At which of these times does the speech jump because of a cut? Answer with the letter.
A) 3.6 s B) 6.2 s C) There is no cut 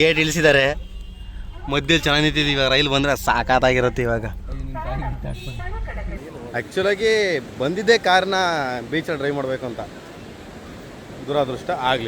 B